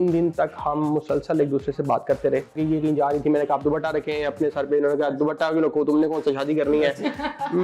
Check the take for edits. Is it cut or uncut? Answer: cut